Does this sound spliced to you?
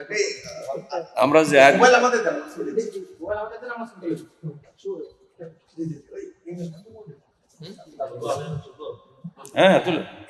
no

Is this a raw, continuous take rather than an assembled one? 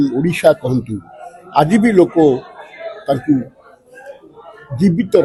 yes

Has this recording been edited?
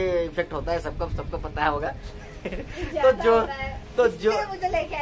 no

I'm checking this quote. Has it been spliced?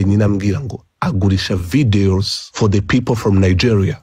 yes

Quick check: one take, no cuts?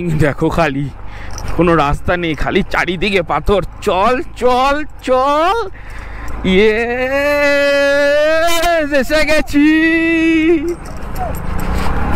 yes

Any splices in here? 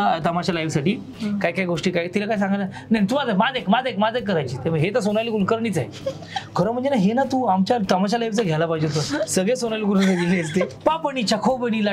yes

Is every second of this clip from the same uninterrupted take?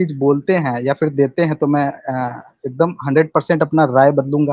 yes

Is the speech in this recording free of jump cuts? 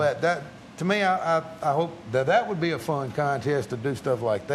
yes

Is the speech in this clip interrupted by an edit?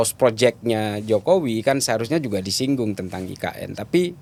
no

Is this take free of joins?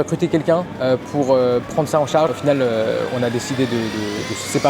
no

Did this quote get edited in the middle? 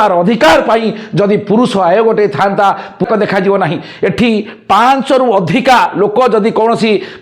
yes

